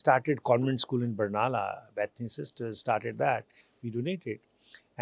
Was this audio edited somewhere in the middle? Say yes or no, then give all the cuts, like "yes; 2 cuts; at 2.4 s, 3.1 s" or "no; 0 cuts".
no; 0 cuts